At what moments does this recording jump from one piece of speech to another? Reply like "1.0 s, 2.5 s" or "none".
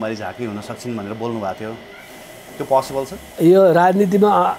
3.2 s

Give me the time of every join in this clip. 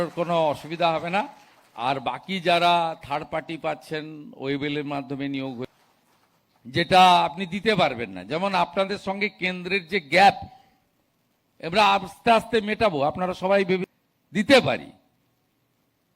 5.7 s, 13.9 s

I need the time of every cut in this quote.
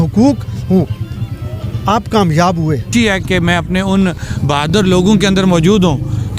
2.9 s

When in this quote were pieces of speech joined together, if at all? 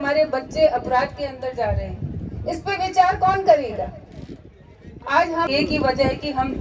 5.5 s

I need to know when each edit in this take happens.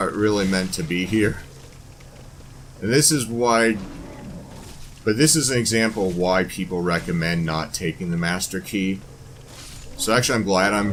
none

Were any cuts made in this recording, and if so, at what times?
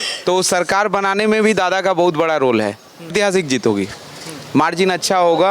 3.1 s

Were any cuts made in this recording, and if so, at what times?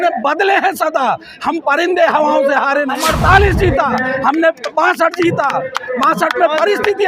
3.0 s

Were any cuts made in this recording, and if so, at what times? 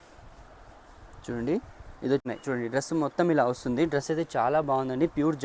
2.2 s

